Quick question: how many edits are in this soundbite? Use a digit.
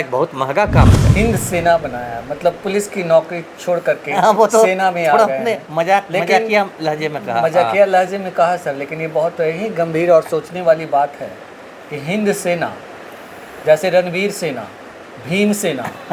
1